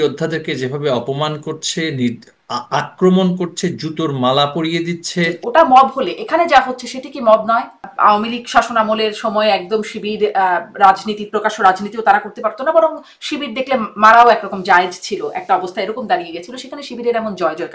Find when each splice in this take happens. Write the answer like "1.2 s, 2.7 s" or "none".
5.3 s, 7.9 s